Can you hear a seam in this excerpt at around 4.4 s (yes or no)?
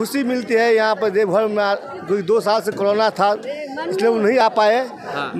no